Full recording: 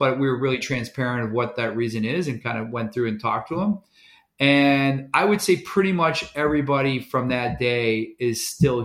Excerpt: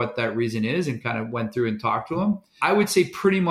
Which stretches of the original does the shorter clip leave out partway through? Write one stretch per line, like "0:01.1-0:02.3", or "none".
0:03.9-0:05.1

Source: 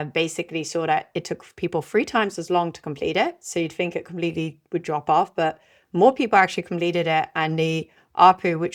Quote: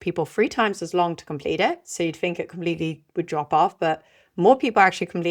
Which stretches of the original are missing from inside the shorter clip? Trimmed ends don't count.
none

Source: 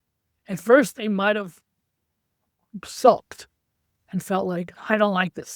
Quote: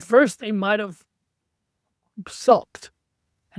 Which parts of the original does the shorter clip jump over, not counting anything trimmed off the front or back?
none

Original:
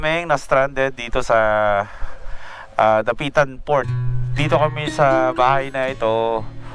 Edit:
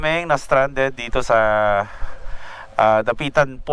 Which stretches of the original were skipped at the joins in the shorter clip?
none

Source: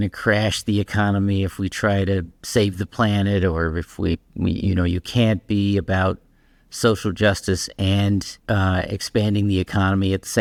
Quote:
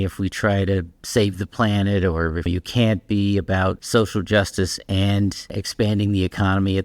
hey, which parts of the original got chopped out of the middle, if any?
0:03.9-0:04.9
0:06.2-0:06.7
0:08.4-0:08.9

